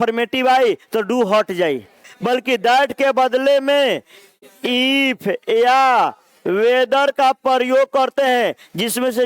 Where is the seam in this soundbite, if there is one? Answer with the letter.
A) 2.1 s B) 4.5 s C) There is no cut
A